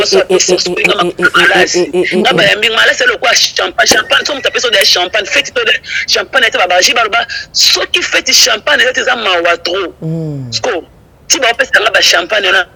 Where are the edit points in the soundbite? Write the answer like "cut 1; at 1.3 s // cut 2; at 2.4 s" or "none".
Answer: none